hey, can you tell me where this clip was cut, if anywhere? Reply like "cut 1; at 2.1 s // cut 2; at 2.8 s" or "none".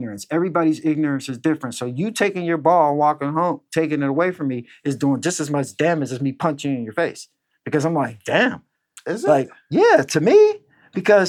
none